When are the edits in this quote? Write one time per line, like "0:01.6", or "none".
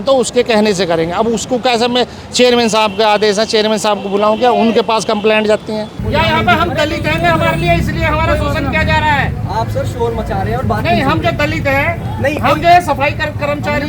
0:06.0